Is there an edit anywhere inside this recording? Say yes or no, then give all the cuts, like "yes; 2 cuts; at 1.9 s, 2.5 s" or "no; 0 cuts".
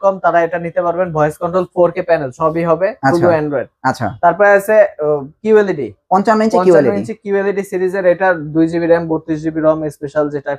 yes; 1 cut; at 3.7 s